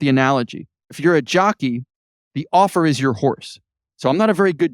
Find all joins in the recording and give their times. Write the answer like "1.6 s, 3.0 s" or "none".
1.0 s